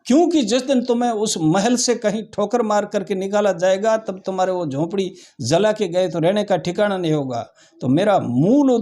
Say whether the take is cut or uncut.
uncut